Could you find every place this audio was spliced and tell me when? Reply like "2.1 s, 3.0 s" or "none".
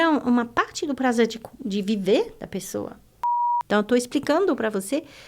3.3 s